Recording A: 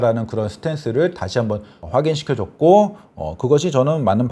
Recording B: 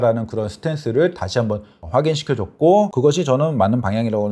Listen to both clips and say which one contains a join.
B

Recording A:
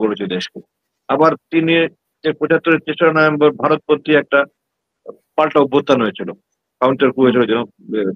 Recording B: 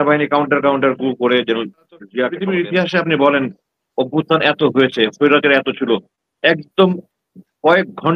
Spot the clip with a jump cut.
B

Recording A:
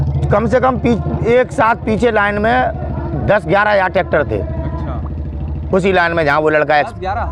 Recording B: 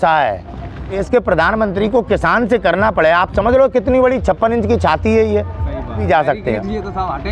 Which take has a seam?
B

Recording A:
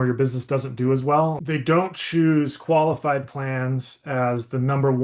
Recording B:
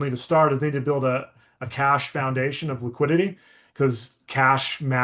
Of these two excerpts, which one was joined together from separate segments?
A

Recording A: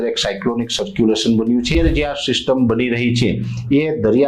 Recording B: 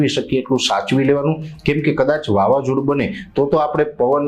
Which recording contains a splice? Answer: A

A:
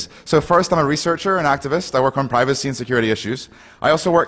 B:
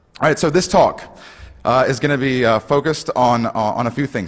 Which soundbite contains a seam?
B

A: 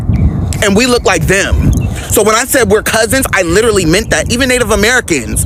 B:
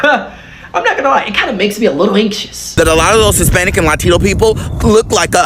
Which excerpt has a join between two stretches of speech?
B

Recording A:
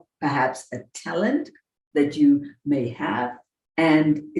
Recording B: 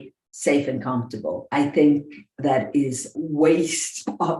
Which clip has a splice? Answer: B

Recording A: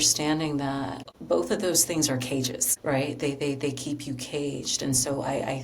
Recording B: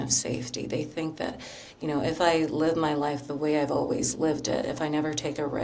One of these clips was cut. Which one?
A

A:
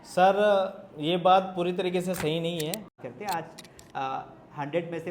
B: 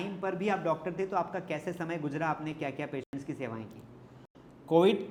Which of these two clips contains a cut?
A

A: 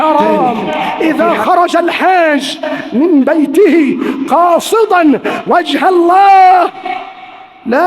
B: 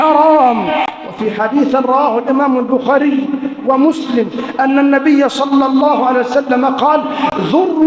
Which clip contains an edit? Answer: A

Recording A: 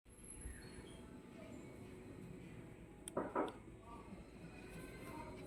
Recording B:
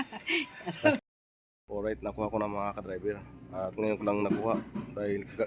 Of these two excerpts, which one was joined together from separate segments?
B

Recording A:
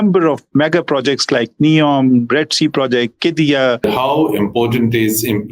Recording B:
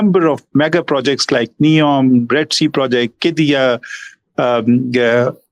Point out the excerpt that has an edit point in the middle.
A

